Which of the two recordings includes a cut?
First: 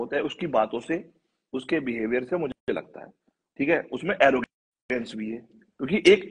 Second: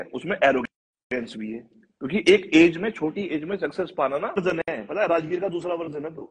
second; 1 cut; at 4.4 s

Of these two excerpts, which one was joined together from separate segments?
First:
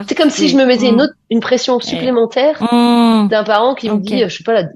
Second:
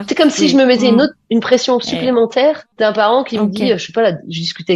second; 1 cut; at 2.7 s

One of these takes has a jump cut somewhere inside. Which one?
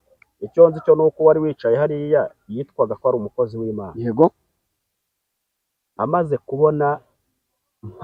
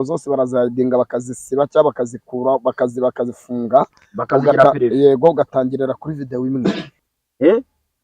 second; 1 cut; at 6.9 s

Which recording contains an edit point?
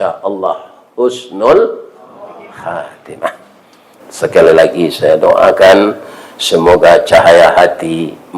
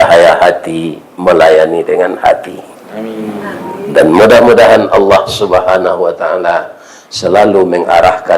first; 1 cut; at 3.9 s

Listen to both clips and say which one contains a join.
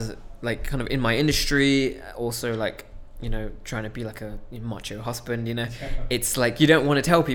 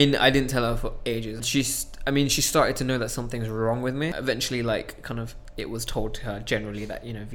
second; 2 cuts; at 1.4 s, 4.1 s

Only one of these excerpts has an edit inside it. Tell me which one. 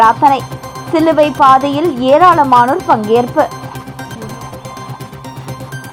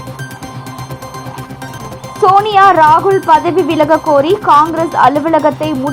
second; 1 cut; at 1.6 s

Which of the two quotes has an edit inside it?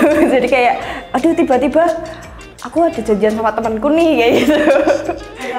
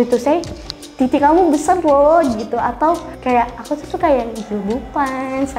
second; 1 cut; at 3.1 s

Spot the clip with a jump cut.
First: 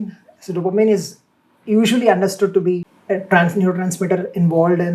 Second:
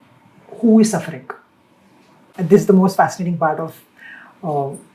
first; 1 cut; at 2.9 s

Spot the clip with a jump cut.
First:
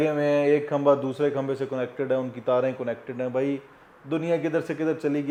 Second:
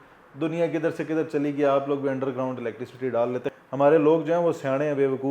second; 1 cut; at 3.5 s

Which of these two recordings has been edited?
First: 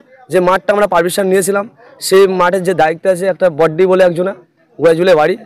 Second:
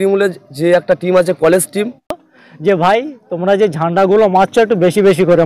second; 1 cut; at 2.2 s

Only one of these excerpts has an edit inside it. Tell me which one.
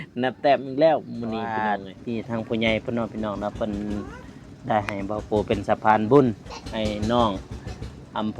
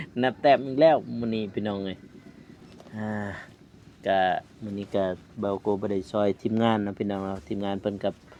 first; 1 cut; at 1.5 s

